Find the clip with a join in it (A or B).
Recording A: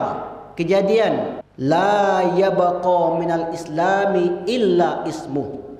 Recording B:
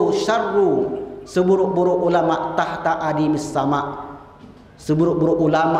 A